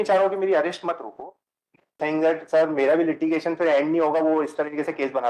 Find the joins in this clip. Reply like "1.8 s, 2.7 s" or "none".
2.0 s